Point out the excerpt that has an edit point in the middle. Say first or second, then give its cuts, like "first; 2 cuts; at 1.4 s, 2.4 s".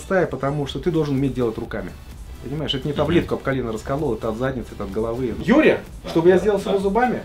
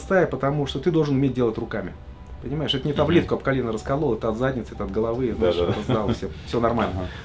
first; 1 cut; at 5.3 s